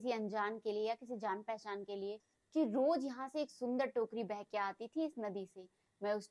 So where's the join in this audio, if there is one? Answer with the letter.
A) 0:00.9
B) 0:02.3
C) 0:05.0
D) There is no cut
B